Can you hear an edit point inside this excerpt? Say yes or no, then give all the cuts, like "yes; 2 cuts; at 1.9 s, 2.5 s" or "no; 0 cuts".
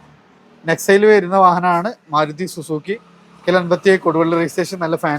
no; 0 cuts